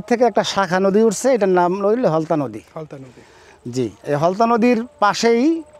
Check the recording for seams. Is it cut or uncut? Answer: uncut